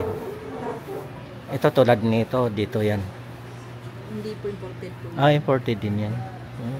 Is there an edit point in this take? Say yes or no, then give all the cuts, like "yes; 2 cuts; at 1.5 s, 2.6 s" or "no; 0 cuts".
no; 0 cuts